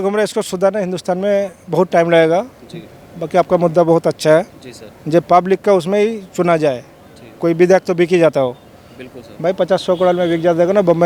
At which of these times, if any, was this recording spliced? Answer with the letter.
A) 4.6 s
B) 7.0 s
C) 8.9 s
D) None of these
D